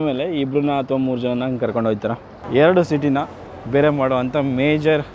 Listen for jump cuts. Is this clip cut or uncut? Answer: cut